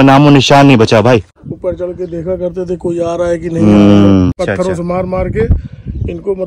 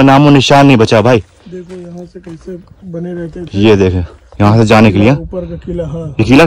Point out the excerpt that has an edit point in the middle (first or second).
first